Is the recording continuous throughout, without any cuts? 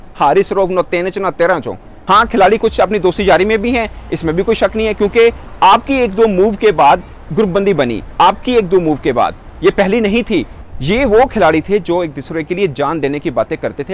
no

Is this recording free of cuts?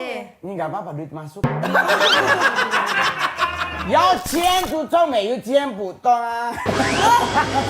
no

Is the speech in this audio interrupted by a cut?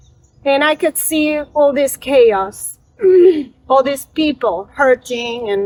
no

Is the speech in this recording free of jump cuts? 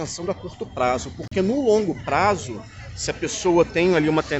yes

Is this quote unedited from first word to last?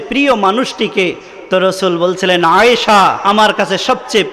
no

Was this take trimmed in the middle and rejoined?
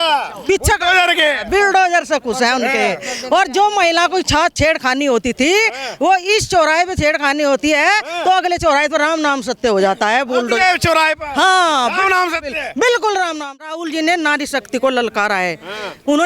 yes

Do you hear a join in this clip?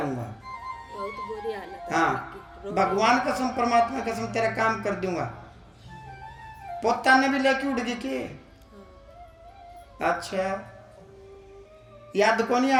no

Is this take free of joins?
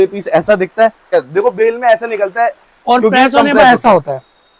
no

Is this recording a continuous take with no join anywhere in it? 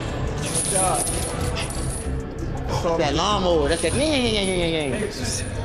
yes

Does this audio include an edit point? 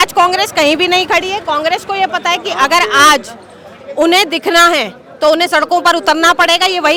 no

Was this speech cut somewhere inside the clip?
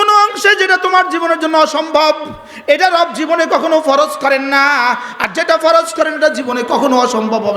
no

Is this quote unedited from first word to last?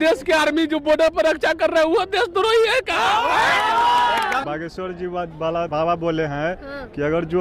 no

